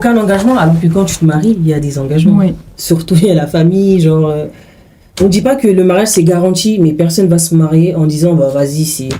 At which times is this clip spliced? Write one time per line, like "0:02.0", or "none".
none

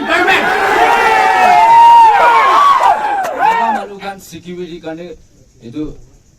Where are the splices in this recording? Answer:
0:03.9

